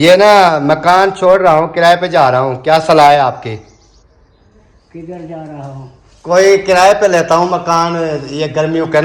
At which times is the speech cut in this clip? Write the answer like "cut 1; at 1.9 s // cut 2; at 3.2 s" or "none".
none